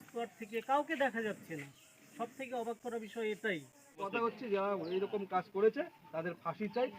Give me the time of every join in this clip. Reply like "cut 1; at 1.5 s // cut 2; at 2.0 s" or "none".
cut 1; at 4.1 s